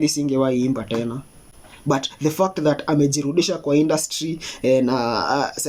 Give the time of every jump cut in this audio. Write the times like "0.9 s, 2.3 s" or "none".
none

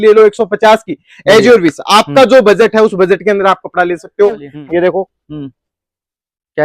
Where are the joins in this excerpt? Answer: 4.5 s

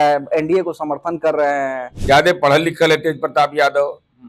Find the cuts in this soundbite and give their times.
1.9 s

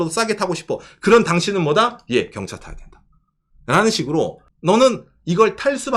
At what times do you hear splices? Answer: 4.5 s

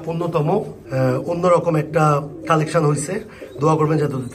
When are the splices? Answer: none

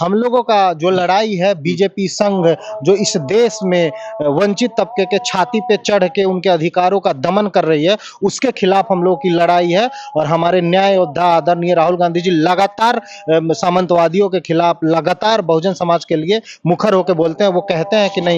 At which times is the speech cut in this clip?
none

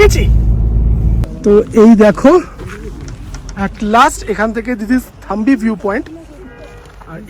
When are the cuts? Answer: 1.2 s

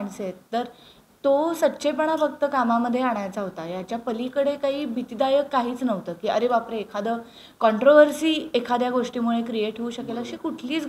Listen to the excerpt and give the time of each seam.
none

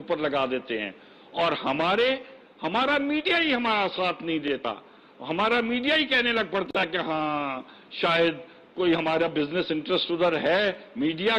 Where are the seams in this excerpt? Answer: 10.1 s

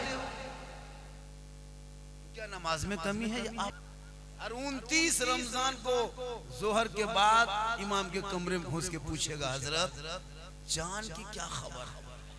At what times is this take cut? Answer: 3.8 s

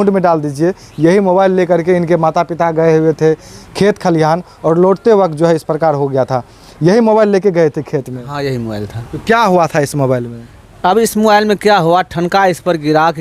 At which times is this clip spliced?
none

